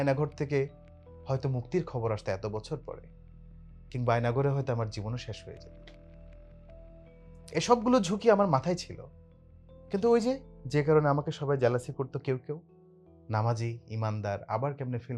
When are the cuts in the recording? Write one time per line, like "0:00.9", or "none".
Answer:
none